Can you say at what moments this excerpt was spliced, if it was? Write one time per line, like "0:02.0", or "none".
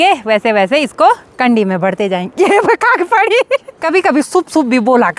0:03.7